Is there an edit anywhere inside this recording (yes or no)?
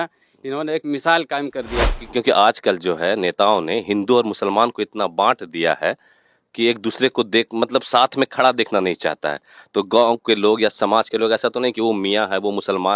yes